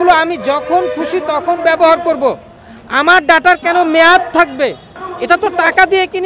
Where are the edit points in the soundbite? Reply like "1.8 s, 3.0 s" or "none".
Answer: 5.1 s